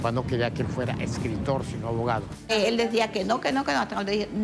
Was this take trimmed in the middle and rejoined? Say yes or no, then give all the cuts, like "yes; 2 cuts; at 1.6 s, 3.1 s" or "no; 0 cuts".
yes; 1 cut; at 2.5 s